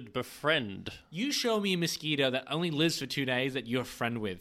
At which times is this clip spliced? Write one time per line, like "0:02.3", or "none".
none